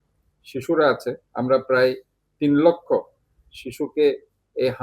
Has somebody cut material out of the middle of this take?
yes; 1 cut; at 1.3 s

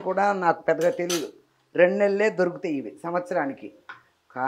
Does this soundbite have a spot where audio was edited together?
no; 0 cuts

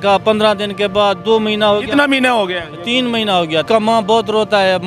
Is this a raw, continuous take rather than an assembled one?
no; 1 cut; at 3.6 s

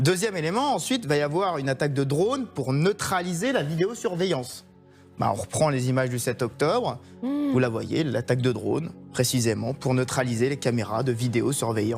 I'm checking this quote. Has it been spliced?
no; 0 cuts

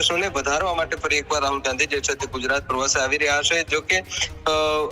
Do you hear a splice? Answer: no; 0 cuts

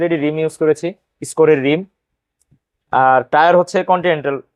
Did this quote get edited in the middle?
no; 0 cuts

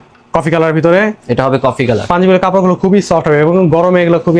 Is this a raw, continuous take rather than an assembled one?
yes; 0 cuts

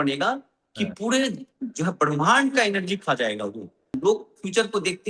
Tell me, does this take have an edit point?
yes; 1 cut; at 3.9 s

